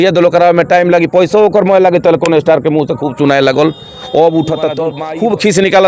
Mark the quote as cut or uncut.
cut